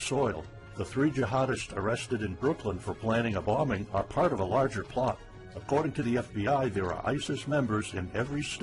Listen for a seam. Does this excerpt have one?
no; 0 cuts

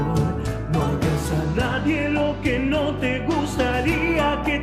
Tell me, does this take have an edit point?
no; 0 cuts

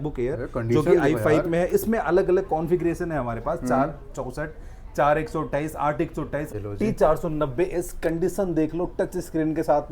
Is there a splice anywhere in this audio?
yes; 1 cut; at 6.5 s

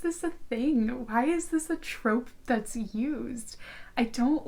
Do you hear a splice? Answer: no; 0 cuts

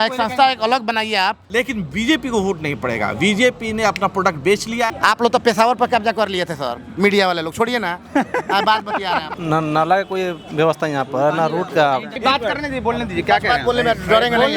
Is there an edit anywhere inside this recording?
yes; 4 cuts; at 1.4 s, 4.9 s, 9.3 s, 12.1 s

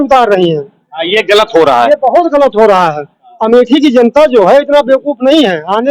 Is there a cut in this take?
no; 0 cuts

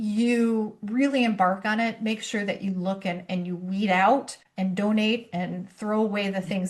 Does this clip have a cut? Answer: no; 0 cuts

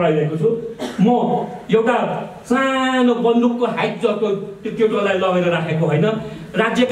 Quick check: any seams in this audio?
no; 0 cuts

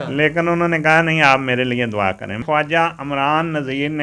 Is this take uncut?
no; 1 cut; at 2.4 s

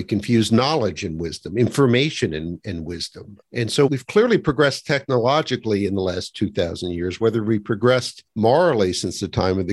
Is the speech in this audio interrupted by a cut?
yes; 2 cuts; at 3.9 s, 8.2 s

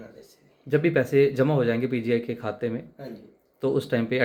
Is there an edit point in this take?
no; 0 cuts

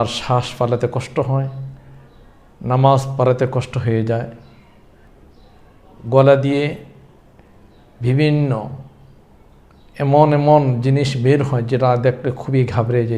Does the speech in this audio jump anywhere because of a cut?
yes; 1 cut; at 5.1 s

